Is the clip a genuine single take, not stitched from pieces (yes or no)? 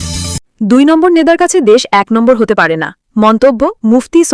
yes